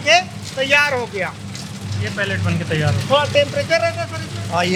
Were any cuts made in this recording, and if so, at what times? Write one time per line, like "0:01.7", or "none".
none